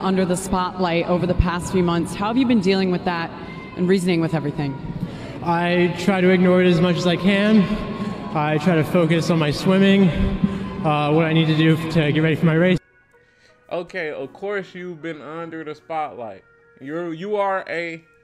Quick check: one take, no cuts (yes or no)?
yes